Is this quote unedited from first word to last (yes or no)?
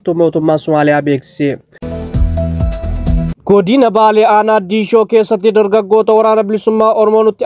no